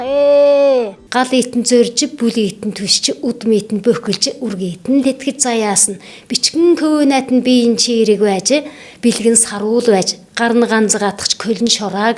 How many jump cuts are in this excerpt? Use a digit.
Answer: 1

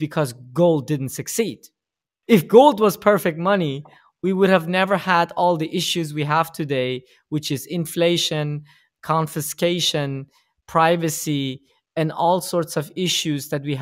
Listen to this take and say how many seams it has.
0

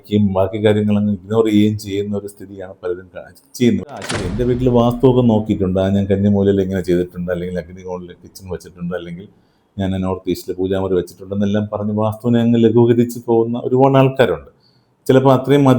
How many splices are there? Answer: 1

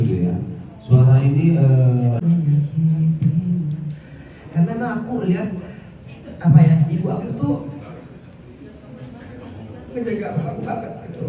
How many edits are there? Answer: 1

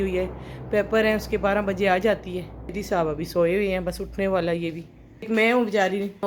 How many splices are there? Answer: 2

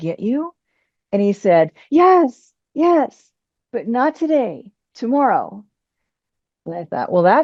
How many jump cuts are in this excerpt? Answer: 0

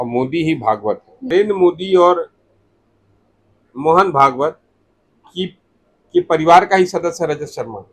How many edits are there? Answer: 1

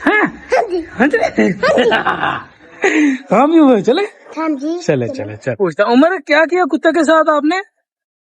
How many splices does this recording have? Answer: 1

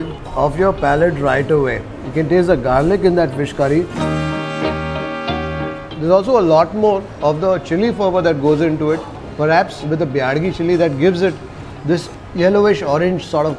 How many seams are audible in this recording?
0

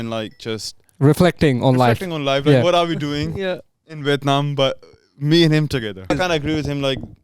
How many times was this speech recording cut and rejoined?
1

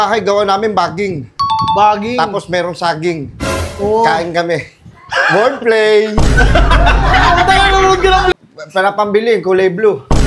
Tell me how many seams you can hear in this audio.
1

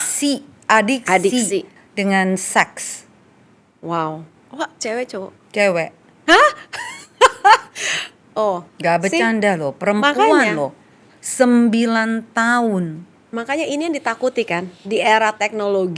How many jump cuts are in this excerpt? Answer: 1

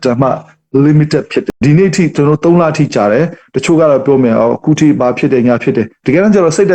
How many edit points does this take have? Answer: 1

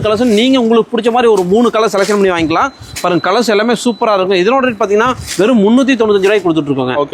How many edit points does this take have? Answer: 0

